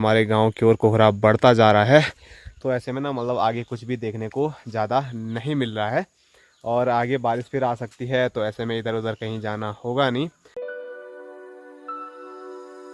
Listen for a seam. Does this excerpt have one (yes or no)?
no